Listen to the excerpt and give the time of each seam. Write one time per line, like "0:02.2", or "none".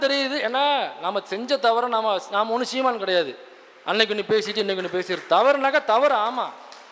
none